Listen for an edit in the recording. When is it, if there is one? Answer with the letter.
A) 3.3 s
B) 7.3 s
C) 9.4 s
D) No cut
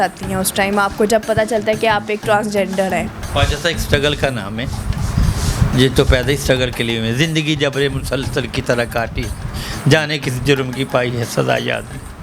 D